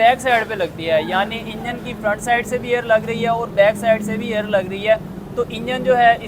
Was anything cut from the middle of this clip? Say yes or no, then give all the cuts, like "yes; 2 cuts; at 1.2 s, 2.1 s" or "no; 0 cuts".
no; 0 cuts